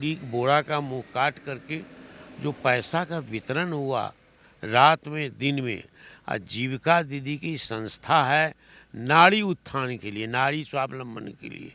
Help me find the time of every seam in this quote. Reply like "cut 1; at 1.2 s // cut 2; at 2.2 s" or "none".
none